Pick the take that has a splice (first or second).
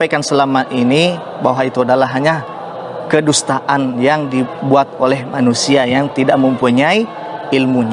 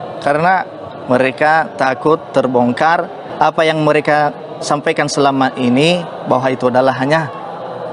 second